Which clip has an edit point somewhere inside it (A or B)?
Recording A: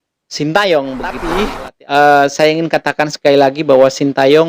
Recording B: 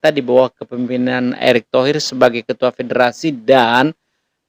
A